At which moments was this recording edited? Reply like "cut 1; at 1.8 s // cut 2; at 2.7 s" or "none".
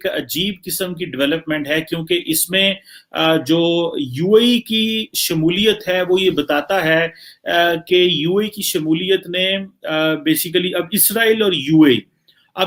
none